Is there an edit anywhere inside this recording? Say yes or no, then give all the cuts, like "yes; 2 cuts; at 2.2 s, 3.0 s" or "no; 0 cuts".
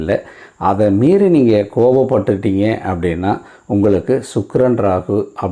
no; 0 cuts